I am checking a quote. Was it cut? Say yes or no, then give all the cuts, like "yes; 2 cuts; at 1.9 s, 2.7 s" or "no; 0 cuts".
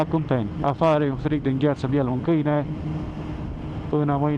no; 0 cuts